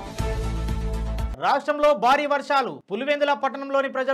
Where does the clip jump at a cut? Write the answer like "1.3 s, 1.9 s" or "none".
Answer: 1.3 s